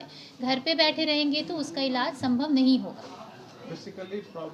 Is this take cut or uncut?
uncut